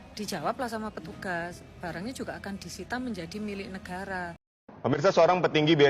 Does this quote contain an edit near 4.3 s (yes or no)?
yes